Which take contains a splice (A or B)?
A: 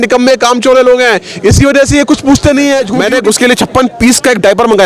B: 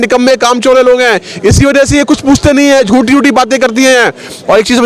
A